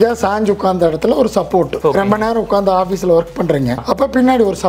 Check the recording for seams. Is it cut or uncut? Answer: cut